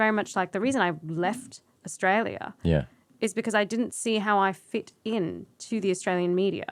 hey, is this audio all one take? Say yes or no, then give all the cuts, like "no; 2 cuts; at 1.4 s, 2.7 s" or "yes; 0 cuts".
yes; 0 cuts